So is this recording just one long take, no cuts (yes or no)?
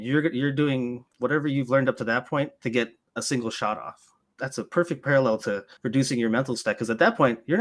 no